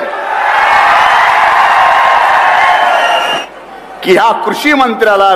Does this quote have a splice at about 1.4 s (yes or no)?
no